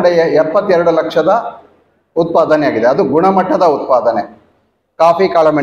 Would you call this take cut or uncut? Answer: uncut